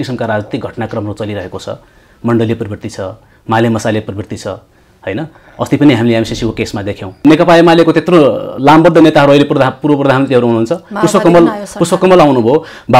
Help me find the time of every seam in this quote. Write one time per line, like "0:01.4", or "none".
0:07.2